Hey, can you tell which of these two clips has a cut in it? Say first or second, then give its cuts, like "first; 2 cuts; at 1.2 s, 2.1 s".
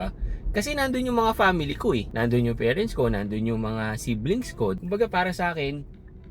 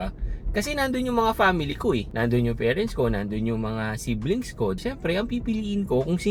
first; 1 cut; at 4.8 s